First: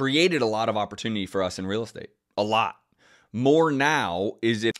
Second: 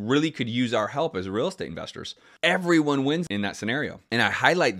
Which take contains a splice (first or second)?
second